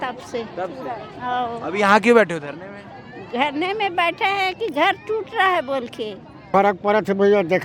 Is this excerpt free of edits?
no; 1 cut; at 6.5 s

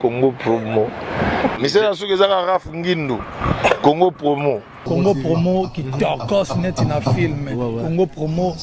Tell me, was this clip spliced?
no; 0 cuts

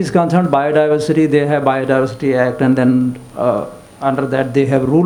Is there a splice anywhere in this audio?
no; 0 cuts

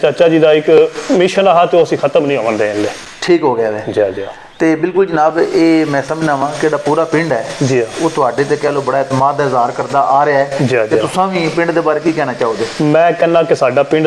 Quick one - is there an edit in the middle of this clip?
no; 0 cuts

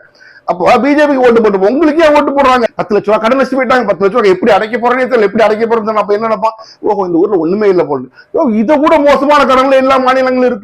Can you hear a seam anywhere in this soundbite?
yes; 1 cut; at 2.6 s

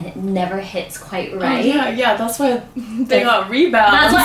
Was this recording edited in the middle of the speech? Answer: no; 0 cuts

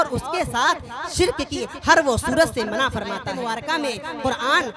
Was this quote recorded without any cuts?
no; 1 cut; at 3.3 s

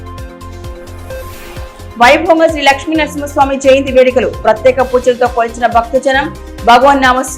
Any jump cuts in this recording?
yes; 1 cut; at 1.1 s

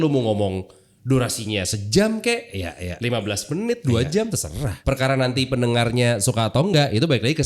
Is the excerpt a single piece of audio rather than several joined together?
no; 1 cut; at 4.7 s

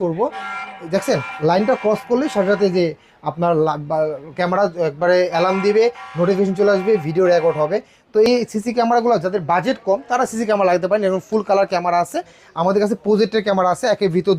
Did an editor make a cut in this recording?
yes; 2 cuts; at 8.3 s, 12.4 s

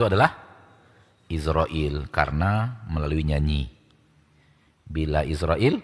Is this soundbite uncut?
yes; 0 cuts

